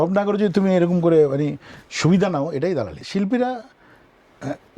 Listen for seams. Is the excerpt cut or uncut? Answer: cut